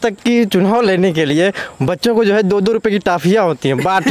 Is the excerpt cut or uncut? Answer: uncut